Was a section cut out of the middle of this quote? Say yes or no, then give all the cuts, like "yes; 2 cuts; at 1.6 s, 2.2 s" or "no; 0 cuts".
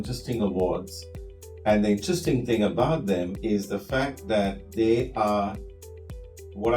no; 0 cuts